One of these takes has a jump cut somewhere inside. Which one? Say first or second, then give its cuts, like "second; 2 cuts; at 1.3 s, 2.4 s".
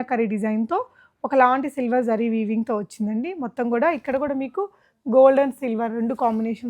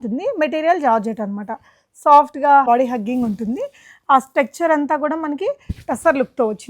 second; 1 cut; at 2.7 s